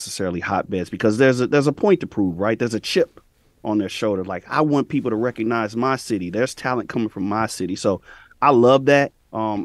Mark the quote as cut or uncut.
uncut